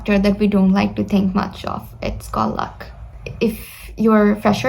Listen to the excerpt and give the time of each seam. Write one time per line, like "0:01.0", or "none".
0:03.3